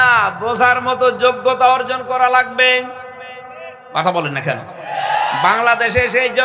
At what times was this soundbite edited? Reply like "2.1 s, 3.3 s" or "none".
none